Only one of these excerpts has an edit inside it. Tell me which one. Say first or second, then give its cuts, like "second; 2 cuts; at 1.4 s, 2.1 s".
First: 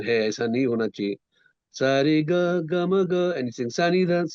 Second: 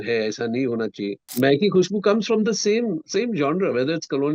second; 1 cut; at 1.2 s